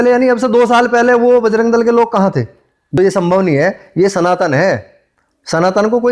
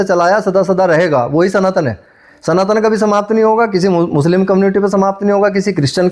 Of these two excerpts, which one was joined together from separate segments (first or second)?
first